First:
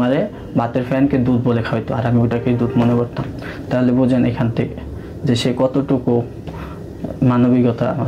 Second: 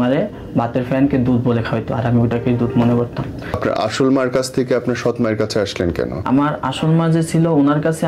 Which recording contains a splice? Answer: second; 2 cuts; at 3.6 s, 6.2 s

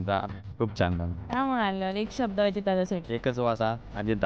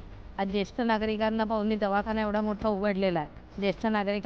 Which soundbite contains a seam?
first; 2 cuts; at 1.1 s, 3.1 s

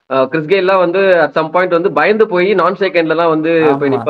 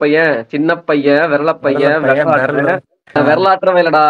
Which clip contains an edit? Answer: second; 1 cut; at 3.1 s

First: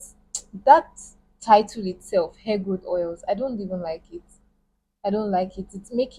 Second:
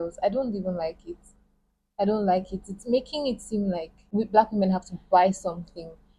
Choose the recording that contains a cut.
second; 1 cut; at 4.1 s

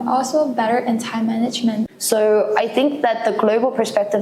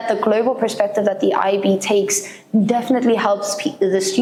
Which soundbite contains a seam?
first; 1 cut; at 1.9 s

